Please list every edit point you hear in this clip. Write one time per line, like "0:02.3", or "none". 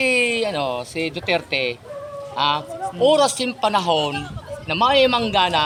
none

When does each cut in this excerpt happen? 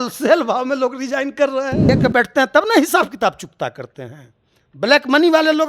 0:01.8

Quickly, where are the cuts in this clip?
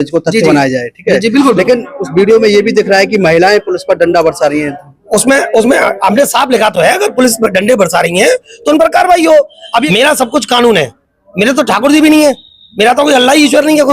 0:09.9

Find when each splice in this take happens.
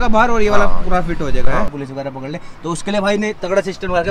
0:01.7

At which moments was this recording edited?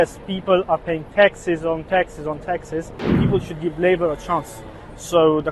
0:03.2

